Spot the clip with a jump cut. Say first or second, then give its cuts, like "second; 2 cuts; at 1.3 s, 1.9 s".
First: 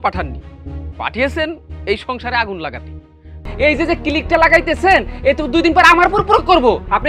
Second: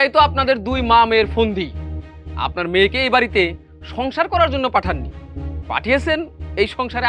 first; 1 cut; at 3.4 s